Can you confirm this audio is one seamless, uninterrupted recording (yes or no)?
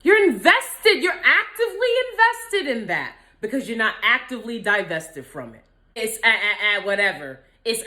no